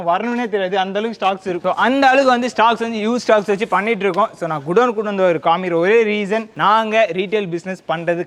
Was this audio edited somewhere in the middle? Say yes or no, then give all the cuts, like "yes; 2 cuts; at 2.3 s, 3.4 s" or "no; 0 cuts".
no; 0 cuts